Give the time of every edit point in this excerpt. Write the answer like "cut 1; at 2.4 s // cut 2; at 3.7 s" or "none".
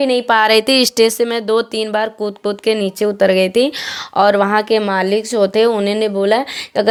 none